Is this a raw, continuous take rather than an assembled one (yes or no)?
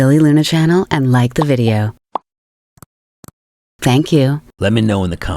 no